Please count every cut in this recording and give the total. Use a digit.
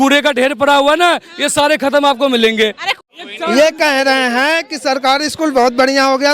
1